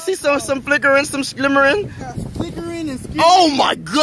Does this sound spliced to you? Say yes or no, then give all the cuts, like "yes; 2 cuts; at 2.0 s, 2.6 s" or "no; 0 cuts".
no; 0 cuts